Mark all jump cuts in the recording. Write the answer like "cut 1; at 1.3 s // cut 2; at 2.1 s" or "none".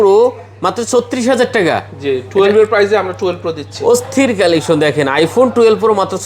none